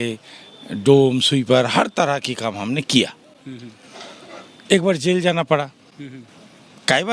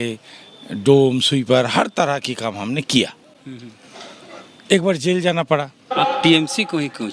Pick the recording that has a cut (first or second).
second